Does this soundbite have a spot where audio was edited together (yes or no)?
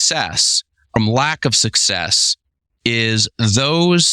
yes